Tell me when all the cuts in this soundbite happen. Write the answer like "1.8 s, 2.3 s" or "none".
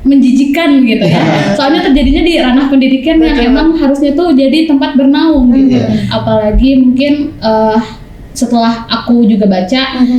6.1 s